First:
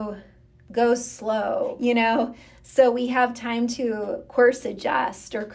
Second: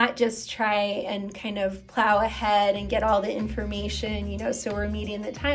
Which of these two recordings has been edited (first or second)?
first